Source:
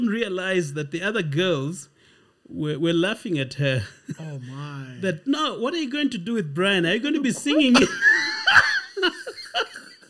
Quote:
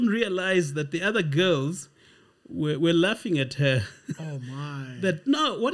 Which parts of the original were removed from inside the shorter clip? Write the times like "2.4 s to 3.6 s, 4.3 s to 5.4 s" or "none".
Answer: none